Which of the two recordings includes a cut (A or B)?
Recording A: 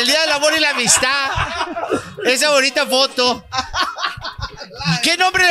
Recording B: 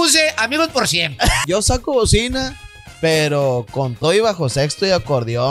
B